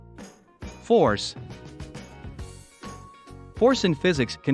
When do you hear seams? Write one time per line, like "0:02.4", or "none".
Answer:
0:01.9
0:03.6